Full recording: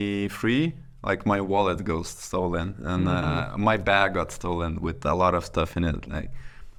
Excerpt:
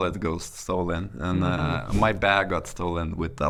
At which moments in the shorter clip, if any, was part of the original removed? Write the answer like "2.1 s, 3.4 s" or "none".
none